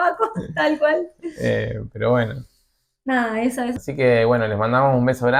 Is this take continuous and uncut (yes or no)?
yes